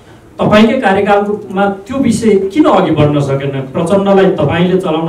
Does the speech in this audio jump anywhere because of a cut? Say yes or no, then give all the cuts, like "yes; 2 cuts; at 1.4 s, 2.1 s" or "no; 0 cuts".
no; 0 cuts